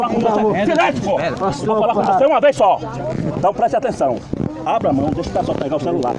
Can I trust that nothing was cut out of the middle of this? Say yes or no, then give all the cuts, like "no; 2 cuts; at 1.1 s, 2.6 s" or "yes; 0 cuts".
yes; 0 cuts